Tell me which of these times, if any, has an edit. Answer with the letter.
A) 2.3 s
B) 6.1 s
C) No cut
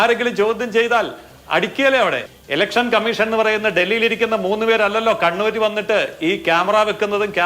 A